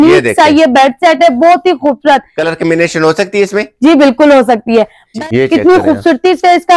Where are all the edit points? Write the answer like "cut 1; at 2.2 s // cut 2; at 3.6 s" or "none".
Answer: cut 1; at 5.0 s